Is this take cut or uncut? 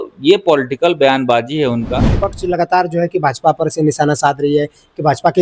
cut